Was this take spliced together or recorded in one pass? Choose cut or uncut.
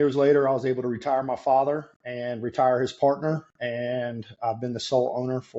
uncut